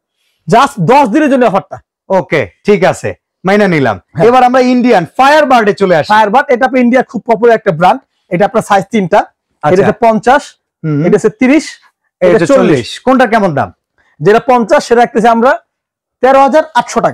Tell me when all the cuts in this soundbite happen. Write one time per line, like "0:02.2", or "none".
none